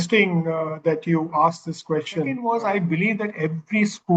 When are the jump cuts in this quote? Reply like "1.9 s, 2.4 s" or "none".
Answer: 2.4 s